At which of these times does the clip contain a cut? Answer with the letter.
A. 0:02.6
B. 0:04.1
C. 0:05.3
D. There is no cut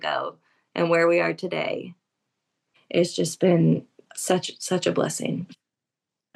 A